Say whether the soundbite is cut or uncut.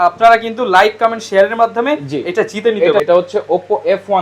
cut